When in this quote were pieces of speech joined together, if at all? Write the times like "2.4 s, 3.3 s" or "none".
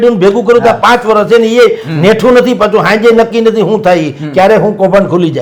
none

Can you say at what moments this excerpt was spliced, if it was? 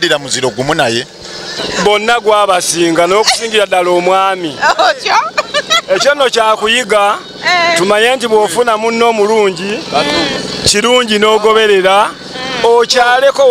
1.6 s

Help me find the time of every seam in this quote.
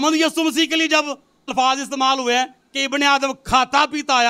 1.5 s

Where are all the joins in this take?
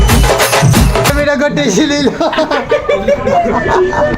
1.1 s

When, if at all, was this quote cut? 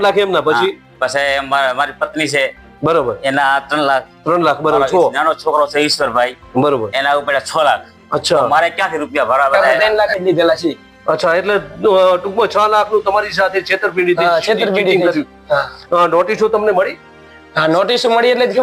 9.8 s

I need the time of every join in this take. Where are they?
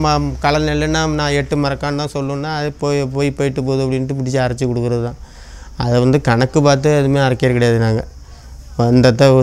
none

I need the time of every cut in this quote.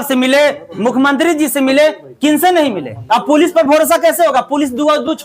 2.9 s

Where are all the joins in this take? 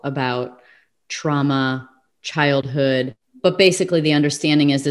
3.2 s

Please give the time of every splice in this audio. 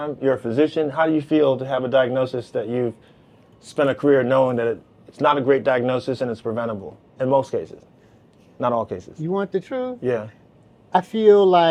none

